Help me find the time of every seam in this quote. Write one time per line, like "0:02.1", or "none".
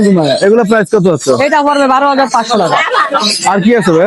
none